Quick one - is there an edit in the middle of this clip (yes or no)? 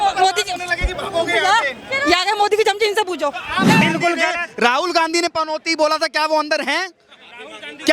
yes